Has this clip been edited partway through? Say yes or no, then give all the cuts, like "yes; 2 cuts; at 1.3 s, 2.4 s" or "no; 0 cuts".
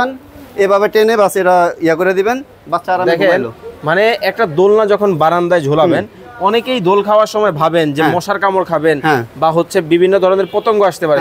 no; 0 cuts